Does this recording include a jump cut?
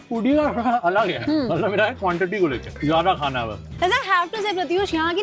yes; 3 cuts; at 1.2 s, 2.7 s, 3.7 s

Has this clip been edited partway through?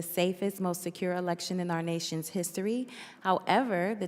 no; 0 cuts

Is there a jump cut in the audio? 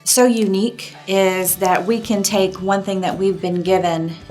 yes; 1 cut; at 0.9 s

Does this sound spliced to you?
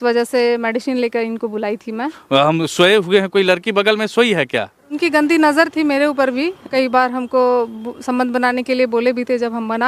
yes; 3 cuts; at 2.2 s, 5.0 s, 6.6 s

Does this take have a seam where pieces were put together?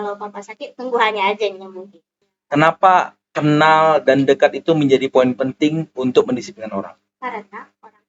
yes; 1 cut; at 2.3 s

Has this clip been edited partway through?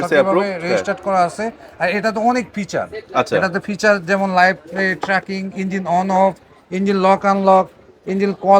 no; 0 cuts

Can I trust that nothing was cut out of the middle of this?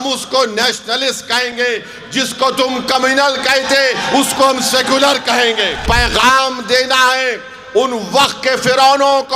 no; 1 cut; at 5.8 s

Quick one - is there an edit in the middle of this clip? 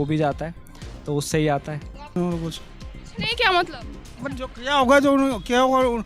yes; 1 cut; at 2.2 s

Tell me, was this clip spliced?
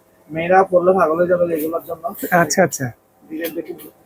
no; 0 cuts

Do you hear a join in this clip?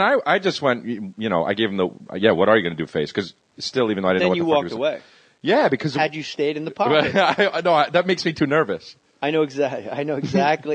yes; 1 cut; at 5.7 s

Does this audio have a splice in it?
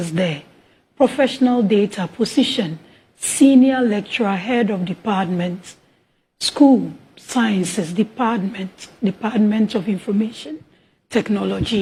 no; 0 cuts

